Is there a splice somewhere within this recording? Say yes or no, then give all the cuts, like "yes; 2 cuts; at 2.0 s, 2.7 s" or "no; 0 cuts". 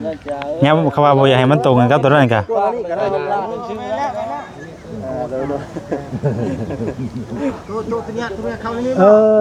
no; 0 cuts